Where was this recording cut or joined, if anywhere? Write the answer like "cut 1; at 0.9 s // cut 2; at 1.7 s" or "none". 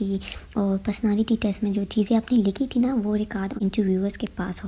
cut 1; at 3.6 s